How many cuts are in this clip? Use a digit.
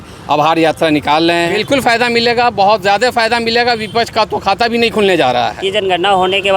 2